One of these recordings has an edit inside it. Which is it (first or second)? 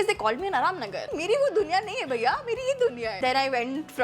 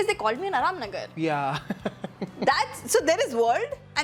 first